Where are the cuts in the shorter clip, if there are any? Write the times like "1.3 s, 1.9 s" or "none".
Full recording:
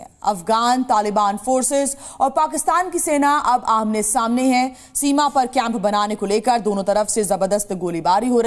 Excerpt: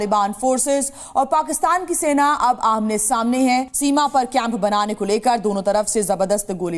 3.7 s